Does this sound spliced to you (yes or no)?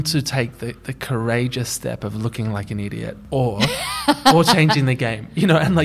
no